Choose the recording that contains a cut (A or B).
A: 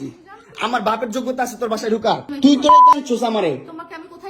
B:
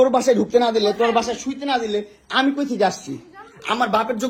A